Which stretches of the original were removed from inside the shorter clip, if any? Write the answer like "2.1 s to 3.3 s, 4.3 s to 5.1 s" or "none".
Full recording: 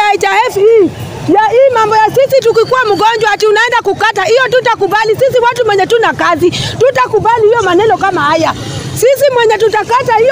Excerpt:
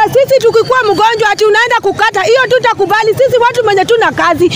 none